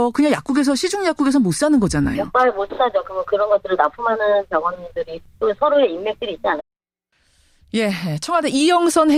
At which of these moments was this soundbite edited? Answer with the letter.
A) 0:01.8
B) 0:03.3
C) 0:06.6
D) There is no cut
D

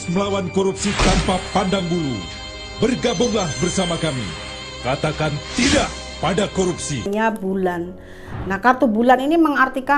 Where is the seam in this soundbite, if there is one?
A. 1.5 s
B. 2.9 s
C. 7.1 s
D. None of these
C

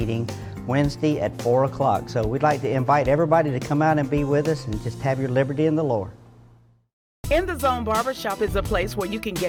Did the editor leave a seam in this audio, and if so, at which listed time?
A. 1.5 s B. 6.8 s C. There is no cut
C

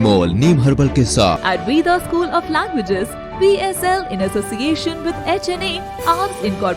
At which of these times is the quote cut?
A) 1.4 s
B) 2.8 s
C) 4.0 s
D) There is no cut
A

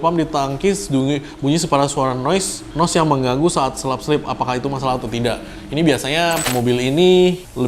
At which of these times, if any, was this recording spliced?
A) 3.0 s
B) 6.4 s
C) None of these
B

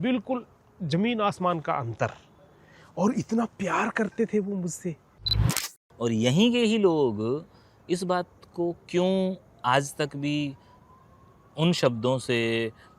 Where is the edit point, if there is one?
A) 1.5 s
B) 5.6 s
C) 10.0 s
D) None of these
B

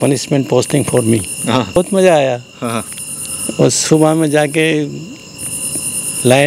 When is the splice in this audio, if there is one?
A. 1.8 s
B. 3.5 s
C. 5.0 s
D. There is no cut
A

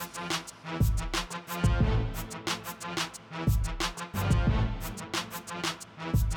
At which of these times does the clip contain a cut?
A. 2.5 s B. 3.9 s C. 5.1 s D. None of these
A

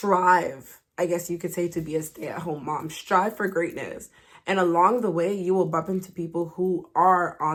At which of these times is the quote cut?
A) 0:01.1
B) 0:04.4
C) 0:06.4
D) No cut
D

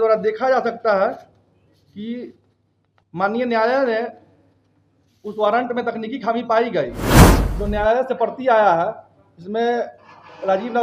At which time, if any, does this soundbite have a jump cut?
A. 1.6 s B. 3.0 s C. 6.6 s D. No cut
D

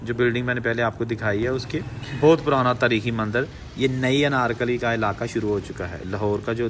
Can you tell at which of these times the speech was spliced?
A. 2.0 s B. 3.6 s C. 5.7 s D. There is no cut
A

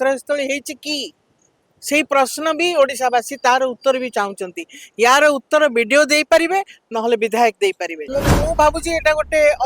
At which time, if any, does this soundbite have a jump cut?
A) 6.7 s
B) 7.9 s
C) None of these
B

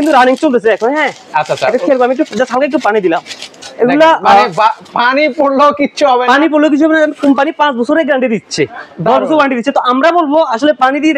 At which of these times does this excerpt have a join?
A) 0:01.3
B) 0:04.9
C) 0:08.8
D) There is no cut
D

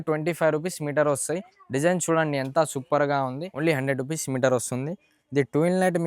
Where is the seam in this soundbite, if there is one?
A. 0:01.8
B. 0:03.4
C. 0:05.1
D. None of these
B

